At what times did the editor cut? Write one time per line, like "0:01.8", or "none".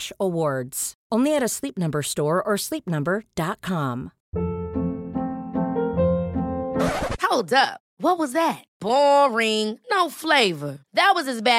0:04.2